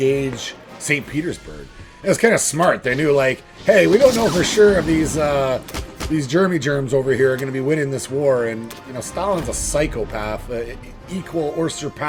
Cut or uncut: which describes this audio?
uncut